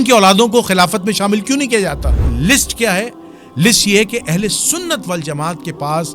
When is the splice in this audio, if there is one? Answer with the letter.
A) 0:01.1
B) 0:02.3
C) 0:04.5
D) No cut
B